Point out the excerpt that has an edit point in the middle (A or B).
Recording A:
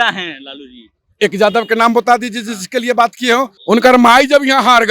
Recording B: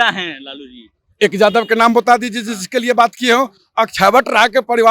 A